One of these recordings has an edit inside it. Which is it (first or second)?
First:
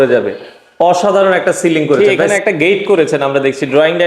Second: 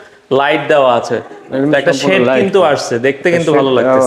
first